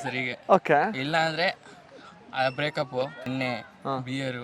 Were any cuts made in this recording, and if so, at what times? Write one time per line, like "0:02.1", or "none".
0:03.3